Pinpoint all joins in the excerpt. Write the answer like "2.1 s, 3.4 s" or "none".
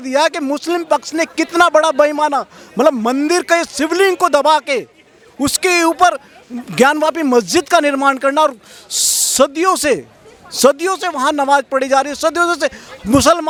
none